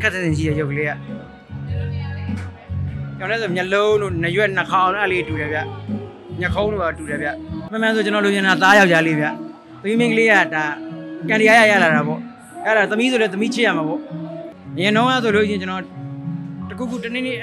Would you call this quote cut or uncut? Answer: uncut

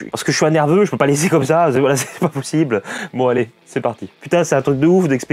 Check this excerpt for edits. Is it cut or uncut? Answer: cut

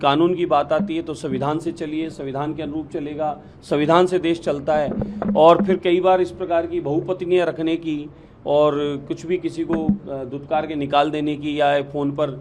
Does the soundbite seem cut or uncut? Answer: uncut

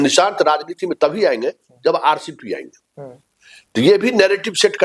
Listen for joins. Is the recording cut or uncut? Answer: uncut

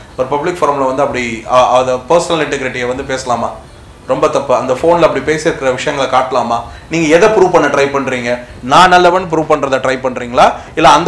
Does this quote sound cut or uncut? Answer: uncut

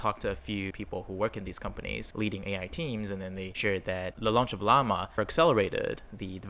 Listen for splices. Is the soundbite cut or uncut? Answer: cut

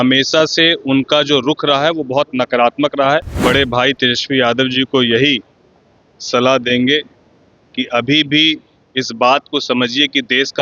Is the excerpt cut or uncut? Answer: cut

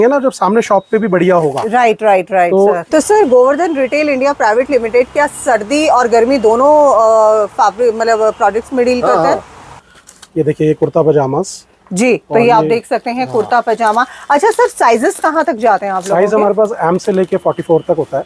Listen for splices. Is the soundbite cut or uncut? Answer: cut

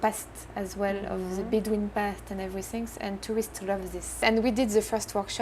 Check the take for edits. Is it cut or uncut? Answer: cut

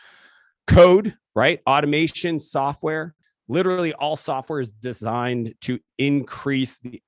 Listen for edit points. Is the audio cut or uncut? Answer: cut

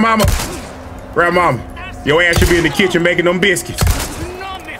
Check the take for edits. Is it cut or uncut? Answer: uncut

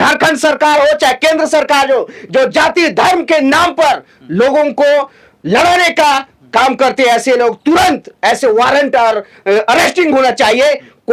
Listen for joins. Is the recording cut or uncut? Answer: uncut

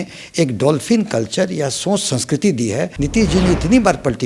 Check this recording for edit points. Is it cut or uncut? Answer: cut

